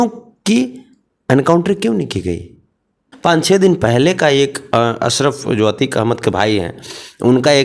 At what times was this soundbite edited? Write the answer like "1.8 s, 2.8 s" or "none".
3.1 s